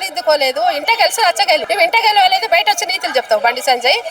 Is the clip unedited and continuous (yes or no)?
no